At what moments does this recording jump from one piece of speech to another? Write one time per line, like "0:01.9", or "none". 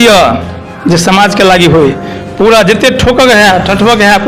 none